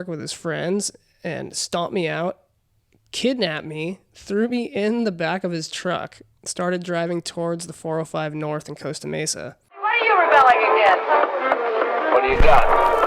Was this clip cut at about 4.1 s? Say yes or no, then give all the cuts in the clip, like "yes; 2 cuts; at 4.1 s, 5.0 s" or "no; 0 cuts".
no; 1 cut; at 9.6 s